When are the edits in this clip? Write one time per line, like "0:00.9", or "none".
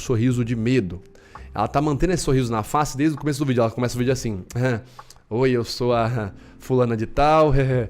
none